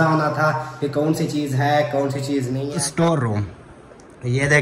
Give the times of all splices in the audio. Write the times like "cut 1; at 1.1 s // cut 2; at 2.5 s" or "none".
cut 1; at 2.7 s